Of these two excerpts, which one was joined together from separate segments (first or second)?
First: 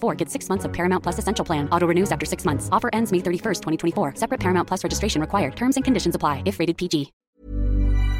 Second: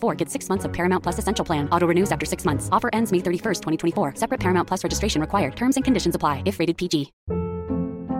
first